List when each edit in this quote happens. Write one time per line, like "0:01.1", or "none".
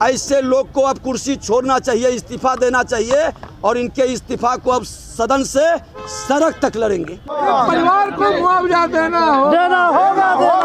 none